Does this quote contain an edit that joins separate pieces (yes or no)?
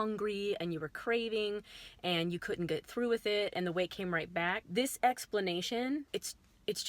yes